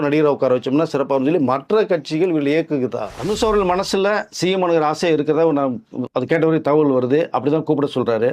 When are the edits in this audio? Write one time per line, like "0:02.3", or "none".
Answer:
0:03.1